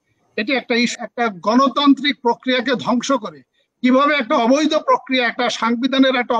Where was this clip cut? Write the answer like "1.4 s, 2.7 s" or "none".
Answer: 0.9 s